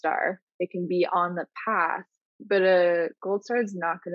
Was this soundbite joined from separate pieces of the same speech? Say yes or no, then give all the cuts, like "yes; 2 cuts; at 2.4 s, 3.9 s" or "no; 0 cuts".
no; 0 cuts